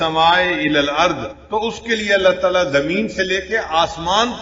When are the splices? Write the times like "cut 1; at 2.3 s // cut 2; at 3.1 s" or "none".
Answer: cut 1; at 1.3 s